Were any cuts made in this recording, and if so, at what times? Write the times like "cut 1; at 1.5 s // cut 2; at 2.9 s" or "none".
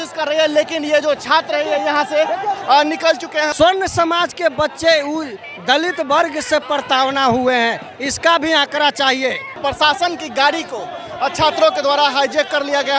cut 1; at 3.5 s // cut 2; at 9.6 s